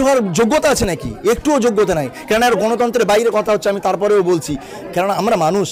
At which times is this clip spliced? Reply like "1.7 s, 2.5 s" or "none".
none